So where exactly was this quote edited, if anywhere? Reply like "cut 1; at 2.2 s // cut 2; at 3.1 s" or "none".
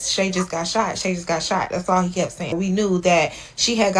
cut 1; at 2.6 s